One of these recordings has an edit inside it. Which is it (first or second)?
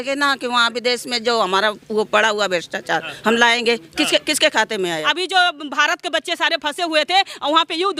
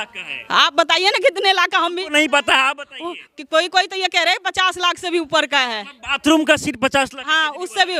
first